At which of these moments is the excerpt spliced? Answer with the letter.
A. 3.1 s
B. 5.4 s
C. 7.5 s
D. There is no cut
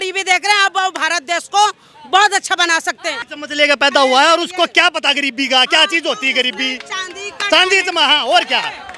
A